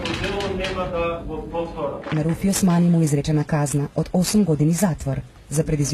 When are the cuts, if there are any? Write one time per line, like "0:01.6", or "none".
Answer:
0:02.0